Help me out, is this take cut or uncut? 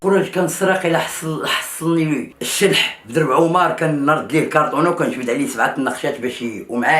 cut